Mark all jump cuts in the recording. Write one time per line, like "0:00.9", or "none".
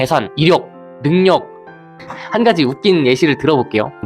0:01.9